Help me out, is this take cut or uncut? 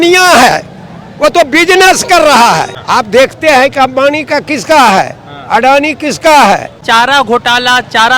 cut